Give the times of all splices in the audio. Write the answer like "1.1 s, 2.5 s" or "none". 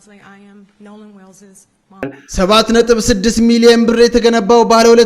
2.2 s